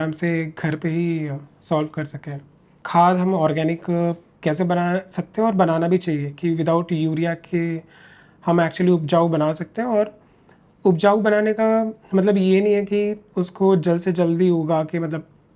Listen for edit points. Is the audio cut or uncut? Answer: cut